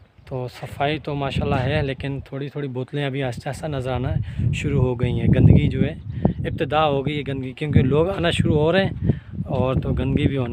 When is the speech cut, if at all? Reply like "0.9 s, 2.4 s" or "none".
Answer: none